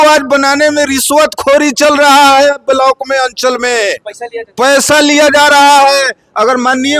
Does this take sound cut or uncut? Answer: uncut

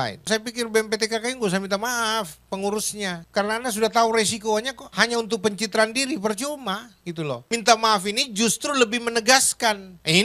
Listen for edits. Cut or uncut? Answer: uncut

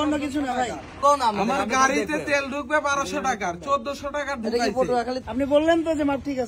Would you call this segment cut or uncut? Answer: cut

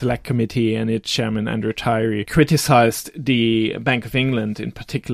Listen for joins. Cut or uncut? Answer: cut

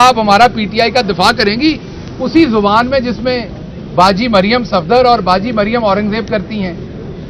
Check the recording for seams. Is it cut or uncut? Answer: uncut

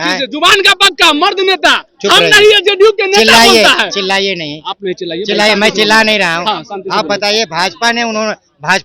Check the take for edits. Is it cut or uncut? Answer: uncut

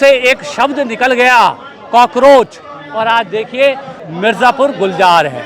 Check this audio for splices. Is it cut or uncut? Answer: cut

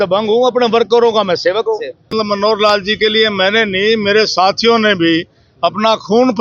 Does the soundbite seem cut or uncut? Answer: cut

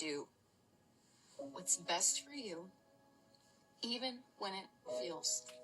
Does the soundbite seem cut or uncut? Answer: uncut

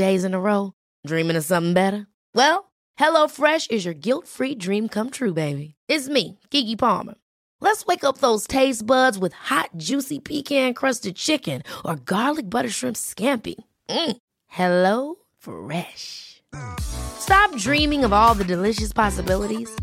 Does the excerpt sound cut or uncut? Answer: uncut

